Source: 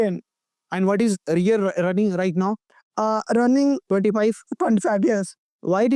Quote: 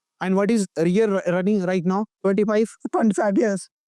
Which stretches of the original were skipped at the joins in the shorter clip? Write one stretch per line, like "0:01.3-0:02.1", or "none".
0:02.7-0:03.8